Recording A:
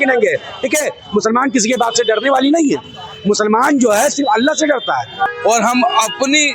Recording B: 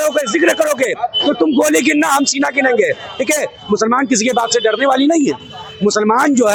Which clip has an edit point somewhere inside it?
A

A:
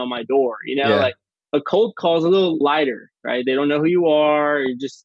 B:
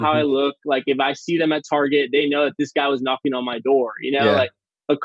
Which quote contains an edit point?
A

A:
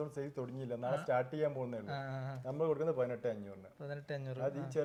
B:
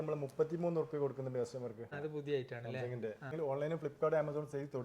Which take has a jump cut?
B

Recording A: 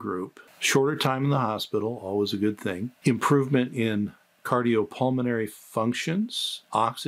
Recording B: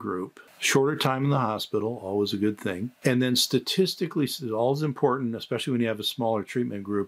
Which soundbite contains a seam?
A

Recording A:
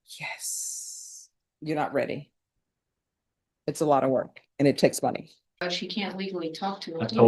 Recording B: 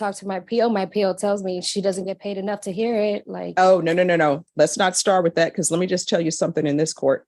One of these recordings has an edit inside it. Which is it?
A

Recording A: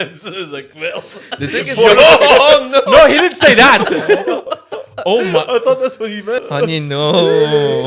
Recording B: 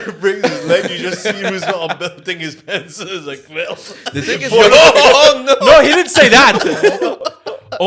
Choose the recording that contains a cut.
A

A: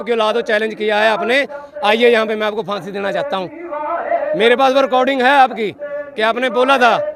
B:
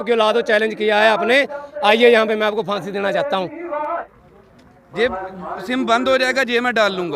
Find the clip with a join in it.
B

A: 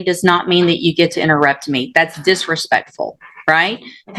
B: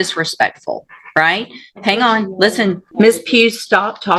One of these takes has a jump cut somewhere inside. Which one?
B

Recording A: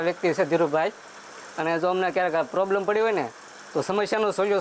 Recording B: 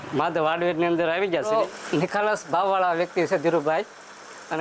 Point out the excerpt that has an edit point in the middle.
B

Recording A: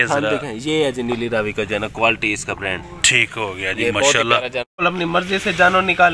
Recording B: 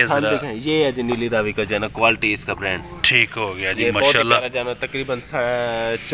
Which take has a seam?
A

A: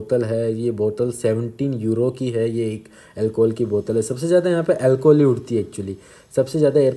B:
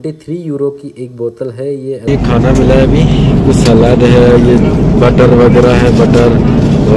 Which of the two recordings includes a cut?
B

